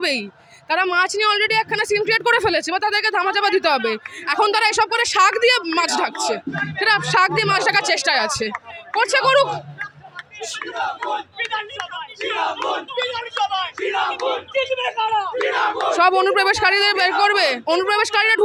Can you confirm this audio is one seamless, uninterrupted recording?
yes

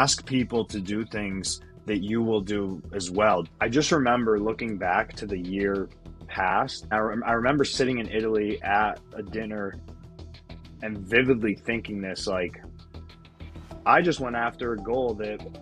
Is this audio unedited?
no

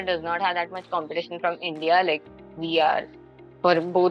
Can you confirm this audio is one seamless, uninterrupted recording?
yes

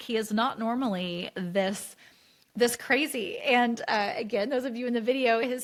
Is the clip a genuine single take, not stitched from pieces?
yes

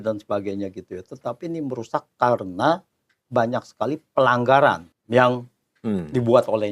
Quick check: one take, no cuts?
no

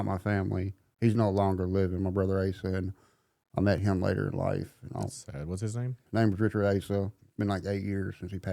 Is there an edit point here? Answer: yes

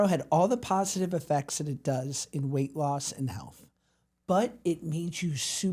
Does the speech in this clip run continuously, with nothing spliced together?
yes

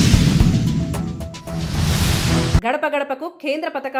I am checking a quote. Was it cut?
no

